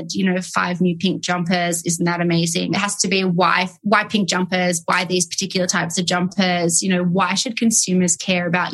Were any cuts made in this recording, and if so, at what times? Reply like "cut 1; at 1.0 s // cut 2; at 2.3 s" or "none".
cut 1; at 2.7 s